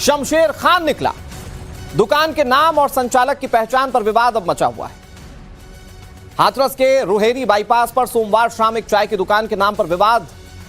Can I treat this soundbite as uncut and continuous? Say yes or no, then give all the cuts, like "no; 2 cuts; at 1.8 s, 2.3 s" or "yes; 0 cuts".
no; 1 cut; at 7.2 s